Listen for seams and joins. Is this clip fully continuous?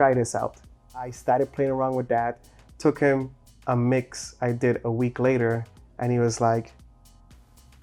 no; 1 cut; at 1.2 s

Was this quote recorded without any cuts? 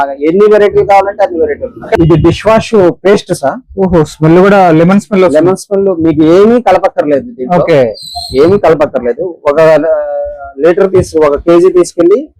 no; 1 cut; at 1.9 s

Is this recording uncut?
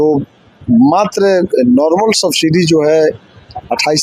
yes; 0 cuts

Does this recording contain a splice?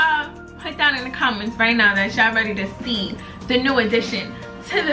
no; 0 cuts

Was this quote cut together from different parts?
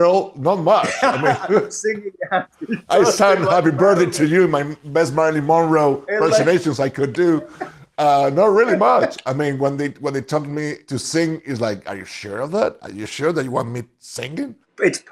no; 0 cuts

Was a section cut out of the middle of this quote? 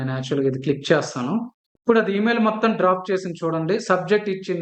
no; 0 cuts

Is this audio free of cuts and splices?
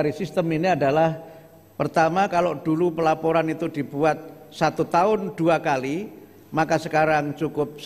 yes; 0 cuts

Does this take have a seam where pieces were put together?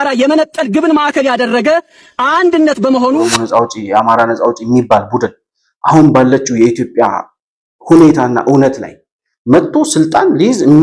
yes; 1 cut; at 3.4 s

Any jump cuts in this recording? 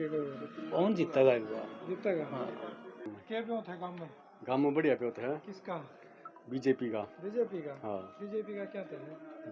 yes; 1 cut; at 2.9 s

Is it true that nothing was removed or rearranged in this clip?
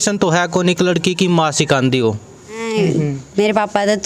no; 1 cut; at 2.7 s

